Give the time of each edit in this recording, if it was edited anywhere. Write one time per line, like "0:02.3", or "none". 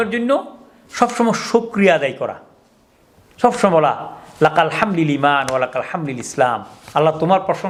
none